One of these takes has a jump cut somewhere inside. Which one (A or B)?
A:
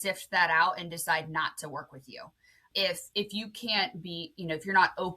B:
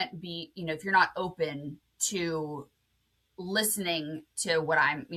A